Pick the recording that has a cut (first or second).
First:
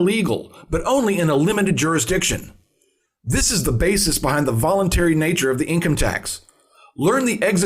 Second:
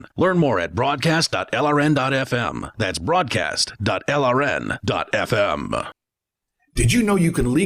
second